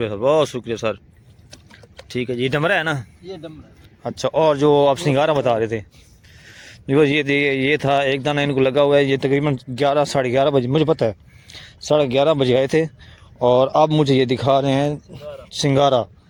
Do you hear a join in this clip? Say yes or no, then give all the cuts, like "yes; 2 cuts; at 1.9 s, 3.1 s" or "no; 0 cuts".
no; 0 cuts